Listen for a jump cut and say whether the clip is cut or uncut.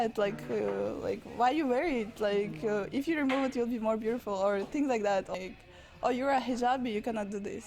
cut